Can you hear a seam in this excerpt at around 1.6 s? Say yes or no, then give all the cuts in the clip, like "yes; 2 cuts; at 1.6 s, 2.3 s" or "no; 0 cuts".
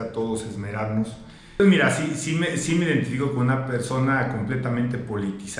yes; 1 cut; at 1.6 s